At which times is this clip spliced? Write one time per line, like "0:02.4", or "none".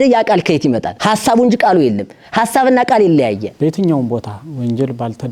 0:00.9
0:03.5